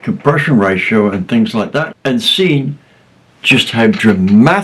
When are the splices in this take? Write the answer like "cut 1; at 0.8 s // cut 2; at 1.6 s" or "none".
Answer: none